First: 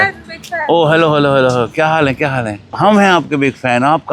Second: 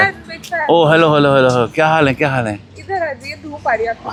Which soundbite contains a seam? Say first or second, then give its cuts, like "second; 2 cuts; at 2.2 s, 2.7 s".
first; 1 cut; at 2.7 s